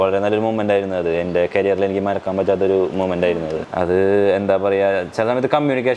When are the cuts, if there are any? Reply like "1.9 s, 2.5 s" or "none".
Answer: 3.6 s

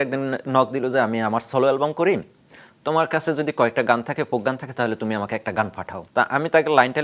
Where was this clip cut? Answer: 5.9 s

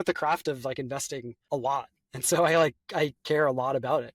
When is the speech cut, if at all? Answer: 1.3 s

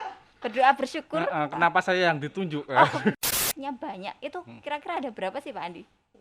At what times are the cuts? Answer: 3.4 s

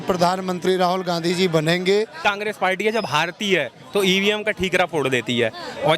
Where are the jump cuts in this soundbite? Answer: 2.2 s

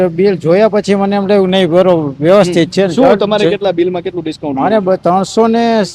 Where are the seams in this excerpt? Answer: none

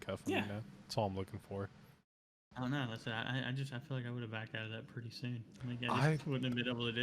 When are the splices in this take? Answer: 2.4 s

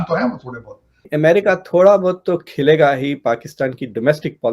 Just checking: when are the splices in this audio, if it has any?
1.0 s

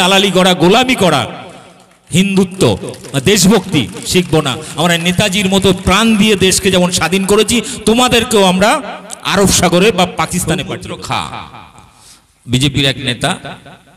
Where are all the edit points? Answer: 10.6 s

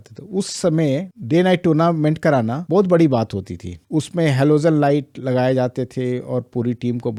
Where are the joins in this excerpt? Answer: none

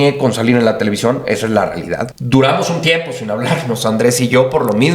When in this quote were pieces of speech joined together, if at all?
2.1 s

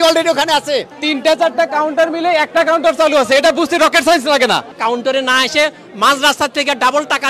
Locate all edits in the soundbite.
0.9 s, 4.7 s

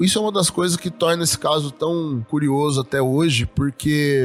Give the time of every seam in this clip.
none

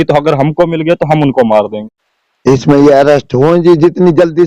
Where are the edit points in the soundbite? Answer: 1.9 s

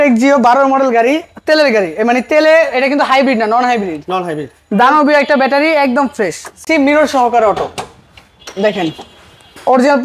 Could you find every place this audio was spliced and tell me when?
6.6 s

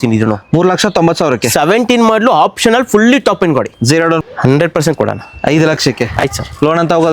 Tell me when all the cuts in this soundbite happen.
4.2 s

